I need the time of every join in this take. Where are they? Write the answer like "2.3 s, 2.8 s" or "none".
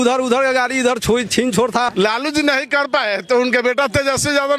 1.9 s